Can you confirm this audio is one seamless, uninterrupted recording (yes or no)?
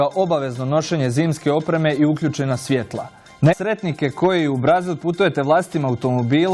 yes